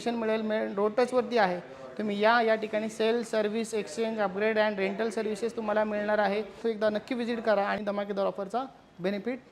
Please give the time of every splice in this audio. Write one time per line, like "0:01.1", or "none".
0:06.6
0:07.8